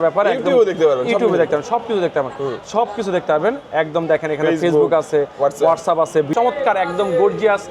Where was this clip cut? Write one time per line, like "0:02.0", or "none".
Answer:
0:06.3